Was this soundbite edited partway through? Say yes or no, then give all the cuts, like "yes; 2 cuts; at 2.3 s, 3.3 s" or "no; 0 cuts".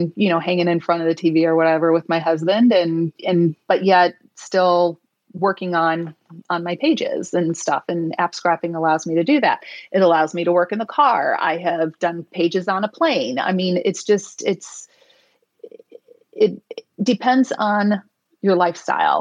no; 0 cuts